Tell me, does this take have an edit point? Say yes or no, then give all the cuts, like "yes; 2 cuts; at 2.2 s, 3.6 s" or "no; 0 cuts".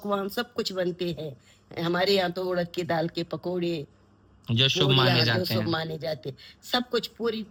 no; 0 cuts